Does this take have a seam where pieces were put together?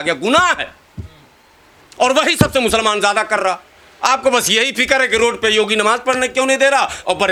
no; 0 cuts

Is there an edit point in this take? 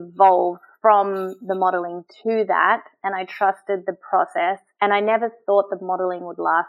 no; 0 cuts

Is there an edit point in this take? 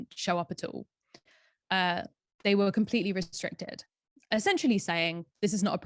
no; 0 cuts

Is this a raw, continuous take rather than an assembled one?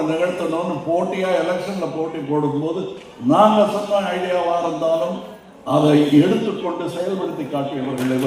yes; 0 cuts

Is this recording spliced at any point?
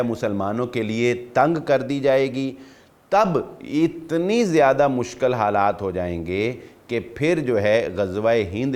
no; 0 cuts

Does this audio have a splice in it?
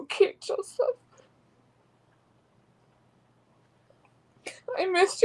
no; 0 cuts

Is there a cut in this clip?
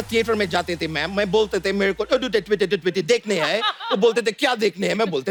no; 0 cuts

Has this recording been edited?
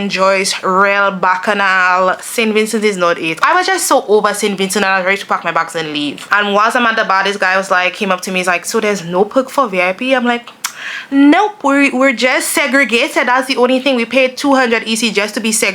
yes; 2 cuts; at 3.4 s, 6.2 s

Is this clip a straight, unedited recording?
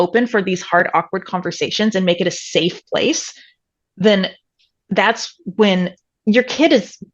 no; 1 cut; at 6.1 s

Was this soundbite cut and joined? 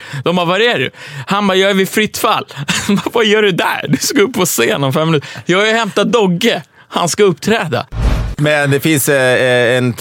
yes; 1 cut; at 8.1 s

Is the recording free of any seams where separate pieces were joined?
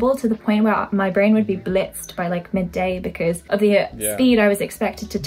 no; 1 cut; at 3.4 s

